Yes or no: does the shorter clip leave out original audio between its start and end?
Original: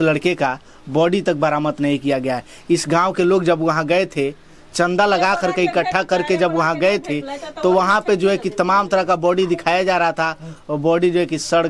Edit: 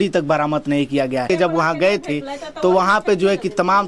yes